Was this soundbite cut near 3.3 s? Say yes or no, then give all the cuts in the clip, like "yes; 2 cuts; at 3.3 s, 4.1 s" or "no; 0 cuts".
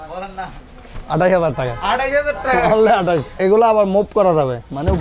yes; 1 cut; at 3.3 s